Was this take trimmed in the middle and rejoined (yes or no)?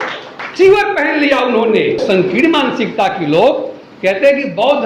yes